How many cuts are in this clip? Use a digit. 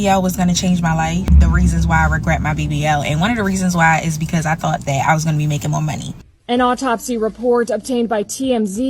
2